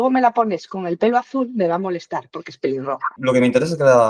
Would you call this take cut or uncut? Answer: cut